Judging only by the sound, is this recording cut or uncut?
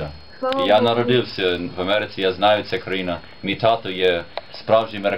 uncut